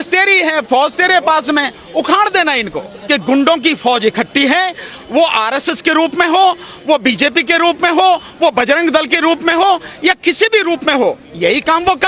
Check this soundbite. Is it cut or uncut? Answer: cut